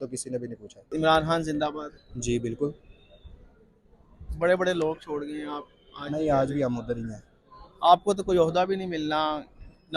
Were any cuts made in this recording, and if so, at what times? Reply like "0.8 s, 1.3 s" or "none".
0.9 s